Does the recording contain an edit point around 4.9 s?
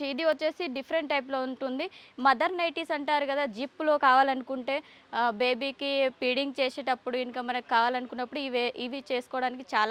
no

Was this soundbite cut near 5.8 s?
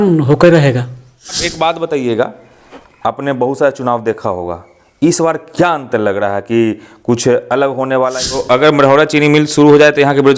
no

